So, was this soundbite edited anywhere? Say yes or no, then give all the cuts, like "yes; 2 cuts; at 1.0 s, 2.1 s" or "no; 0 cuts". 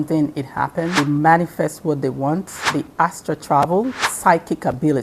yes; 3 cuts; at 0.9 s, 2.6 s, 4.1 s